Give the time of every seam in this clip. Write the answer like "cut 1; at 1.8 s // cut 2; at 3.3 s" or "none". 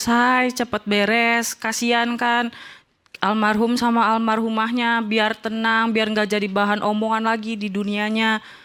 none

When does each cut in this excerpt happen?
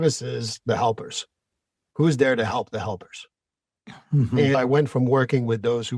cut 1; at 4.5 s

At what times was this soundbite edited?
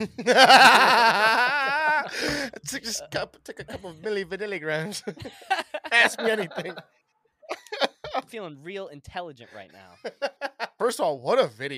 cut 1; at 10.7 s

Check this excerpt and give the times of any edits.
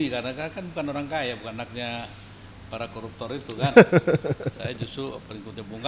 none

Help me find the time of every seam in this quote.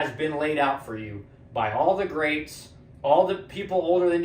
none

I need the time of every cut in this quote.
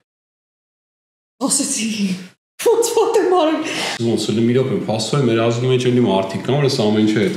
cut 1; at 3.9 s

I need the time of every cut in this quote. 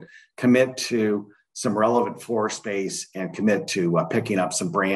none

